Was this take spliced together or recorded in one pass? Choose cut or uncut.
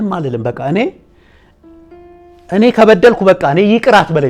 uncut